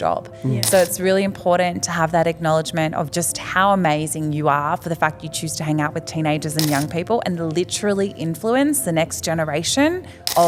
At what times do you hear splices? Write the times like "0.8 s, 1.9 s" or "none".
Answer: none